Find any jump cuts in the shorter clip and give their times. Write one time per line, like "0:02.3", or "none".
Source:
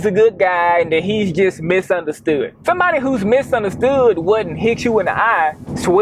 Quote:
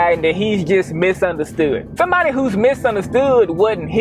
none